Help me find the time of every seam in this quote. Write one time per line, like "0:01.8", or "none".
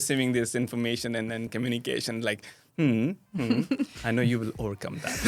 0:01.5